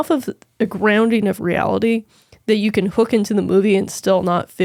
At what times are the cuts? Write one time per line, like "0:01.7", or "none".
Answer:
none